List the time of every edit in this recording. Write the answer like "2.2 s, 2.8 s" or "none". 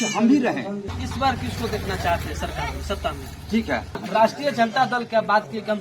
1.0 s, 4.0 s